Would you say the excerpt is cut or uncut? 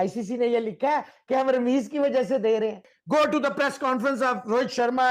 cut